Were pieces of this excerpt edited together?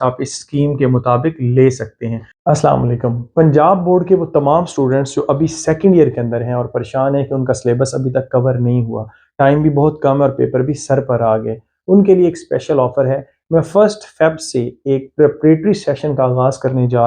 yes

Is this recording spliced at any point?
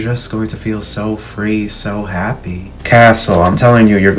yes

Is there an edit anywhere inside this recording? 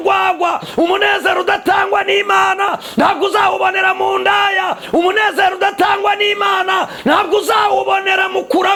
no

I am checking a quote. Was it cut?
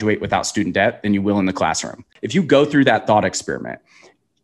yes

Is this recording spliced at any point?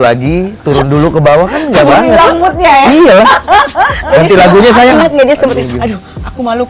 no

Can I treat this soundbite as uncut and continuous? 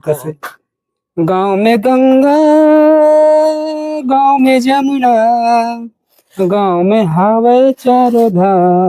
yes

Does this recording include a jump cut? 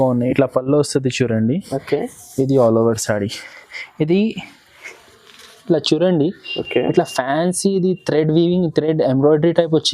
no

